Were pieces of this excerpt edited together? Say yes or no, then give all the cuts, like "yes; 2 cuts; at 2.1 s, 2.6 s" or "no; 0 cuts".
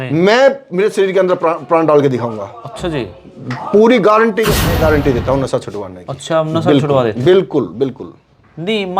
yes; 1 cut; at 4.8 s